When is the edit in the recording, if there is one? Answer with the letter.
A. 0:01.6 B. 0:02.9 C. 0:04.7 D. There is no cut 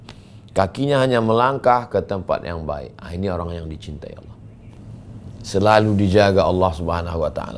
C